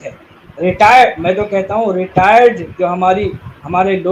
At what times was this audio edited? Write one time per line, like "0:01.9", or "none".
none